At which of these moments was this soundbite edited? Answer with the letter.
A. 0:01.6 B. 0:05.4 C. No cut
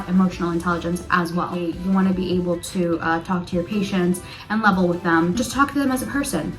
A